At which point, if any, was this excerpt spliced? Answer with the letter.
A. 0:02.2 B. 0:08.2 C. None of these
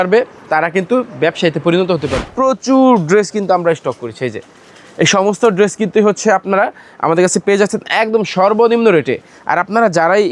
A